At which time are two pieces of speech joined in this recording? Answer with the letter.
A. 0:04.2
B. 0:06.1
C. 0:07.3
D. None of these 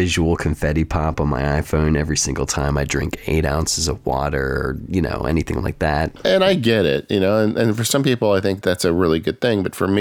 B